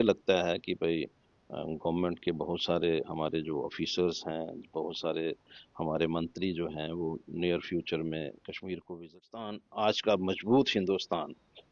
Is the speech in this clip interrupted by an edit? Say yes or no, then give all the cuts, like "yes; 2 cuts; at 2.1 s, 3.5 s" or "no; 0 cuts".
yes; 1 cut; at 9.6 s